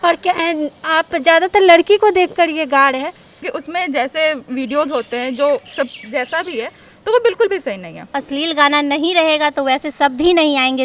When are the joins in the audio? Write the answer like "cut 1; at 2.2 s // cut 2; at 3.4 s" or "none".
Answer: cut 1; at 3.3 s // cut 2; at 8.2 s